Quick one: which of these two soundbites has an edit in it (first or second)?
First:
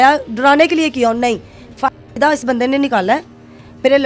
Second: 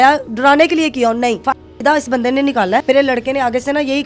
second